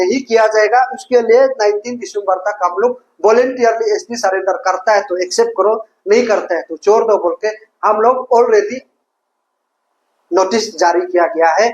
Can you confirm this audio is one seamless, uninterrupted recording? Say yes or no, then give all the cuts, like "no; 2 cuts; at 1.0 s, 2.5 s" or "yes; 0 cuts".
yes; 0 cuts